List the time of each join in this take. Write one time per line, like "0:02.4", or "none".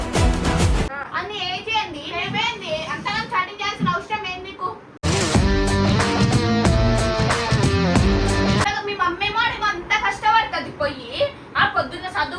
0:00.9
0:08.6